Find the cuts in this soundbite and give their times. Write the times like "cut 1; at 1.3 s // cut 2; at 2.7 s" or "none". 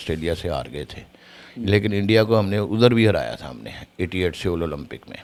none